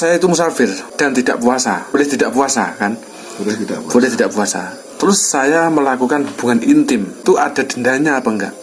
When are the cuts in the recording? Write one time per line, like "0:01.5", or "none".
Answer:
0:00.8
0:02.0
0:07.2